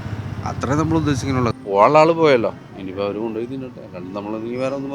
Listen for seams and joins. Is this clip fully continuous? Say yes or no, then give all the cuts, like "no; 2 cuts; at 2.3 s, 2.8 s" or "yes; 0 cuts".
no; 1 cut; at 1.5 s